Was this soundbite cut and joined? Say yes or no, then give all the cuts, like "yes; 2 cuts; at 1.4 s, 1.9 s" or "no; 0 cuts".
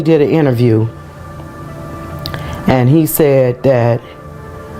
no; 0 cuts